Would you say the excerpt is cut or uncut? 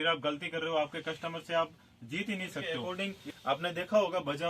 cut